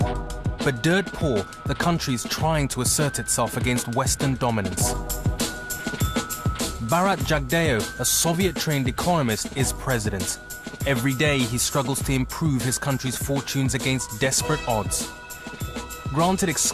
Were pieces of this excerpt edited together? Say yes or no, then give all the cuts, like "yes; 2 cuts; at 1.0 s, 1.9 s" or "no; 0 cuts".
no; 0 cuts